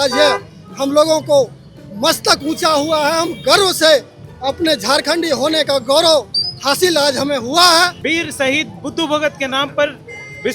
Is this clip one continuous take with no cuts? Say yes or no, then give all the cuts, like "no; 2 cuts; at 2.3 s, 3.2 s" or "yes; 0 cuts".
no; 1 cut; at 8.0 s